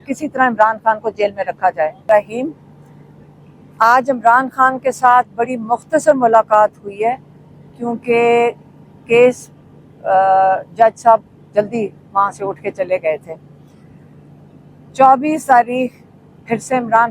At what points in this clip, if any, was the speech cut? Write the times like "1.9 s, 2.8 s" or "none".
2.0 s